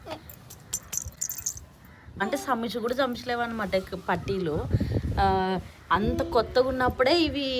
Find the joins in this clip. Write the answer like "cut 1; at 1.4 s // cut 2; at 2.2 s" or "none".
cut 1; at 2.2 s